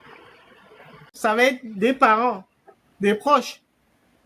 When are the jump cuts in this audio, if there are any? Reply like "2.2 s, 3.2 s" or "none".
1.1 s